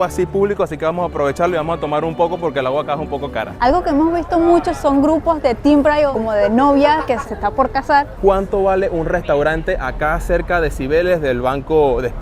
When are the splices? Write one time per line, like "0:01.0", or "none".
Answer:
0:03.5
0:06.1
0:08.1

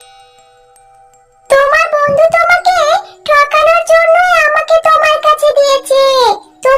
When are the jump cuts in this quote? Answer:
0:01.3

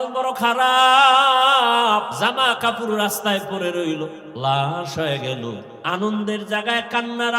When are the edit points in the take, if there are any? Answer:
0:02.1
0:04.2
0:05.7

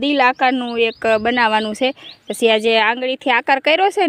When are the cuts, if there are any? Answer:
none

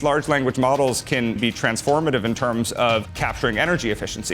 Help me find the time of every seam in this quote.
0:01.4
0:03.1

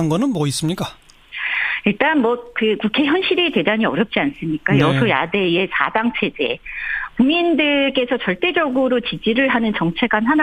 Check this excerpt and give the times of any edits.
0:08.1

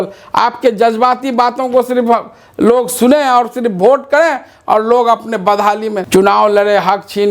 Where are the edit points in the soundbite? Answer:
0:06.0

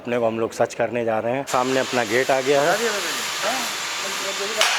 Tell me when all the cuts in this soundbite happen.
0:01.5

